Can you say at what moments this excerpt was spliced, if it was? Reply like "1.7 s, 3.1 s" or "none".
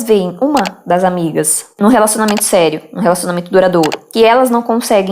4.0 s